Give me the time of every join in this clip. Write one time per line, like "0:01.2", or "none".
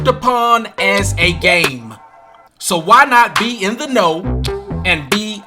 none